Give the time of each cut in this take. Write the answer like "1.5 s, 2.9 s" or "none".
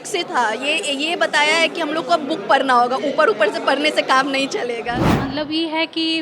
5.0 s